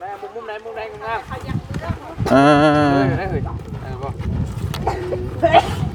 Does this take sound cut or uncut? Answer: uncut